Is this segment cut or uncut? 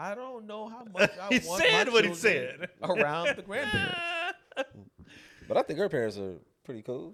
uncut